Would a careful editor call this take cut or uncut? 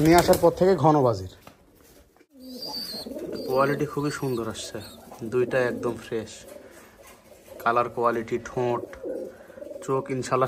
cut